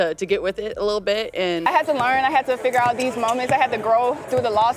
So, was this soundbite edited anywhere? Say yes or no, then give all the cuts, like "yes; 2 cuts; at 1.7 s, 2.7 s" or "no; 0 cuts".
yes; 1 cut; at 1.6 s